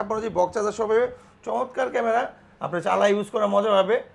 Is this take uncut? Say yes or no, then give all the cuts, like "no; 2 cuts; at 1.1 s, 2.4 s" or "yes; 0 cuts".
yes; 0 cuts